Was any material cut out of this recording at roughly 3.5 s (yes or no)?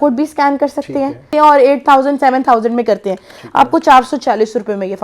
no